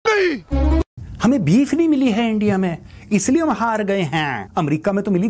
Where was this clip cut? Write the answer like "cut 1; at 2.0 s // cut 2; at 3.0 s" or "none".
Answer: cut 1; at 1.0 s